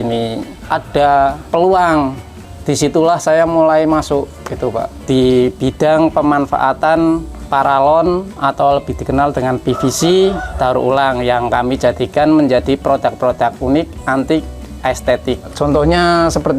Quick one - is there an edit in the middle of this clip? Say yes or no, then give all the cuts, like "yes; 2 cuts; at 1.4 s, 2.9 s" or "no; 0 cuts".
yes; 3 cuts; at 1.4 s, 4.9 s, 15.5 s